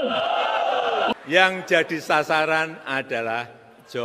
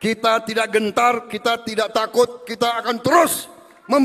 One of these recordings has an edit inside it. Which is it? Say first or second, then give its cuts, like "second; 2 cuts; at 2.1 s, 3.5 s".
first; 1 cut; at 1.1 s